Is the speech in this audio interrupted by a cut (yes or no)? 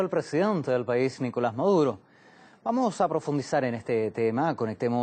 yes